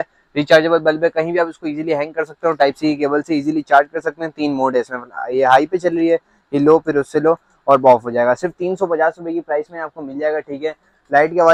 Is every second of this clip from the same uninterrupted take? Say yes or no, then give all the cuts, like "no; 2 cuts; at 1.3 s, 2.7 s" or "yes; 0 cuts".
yes; 0 cuts